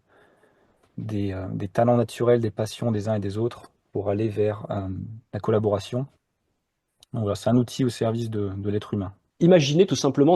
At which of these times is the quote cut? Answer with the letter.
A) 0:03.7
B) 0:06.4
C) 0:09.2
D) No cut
C